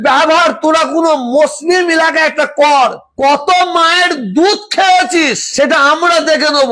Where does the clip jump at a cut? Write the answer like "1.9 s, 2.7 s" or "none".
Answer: none